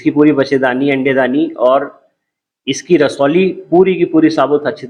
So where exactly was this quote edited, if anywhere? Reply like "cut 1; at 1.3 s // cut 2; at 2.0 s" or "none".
none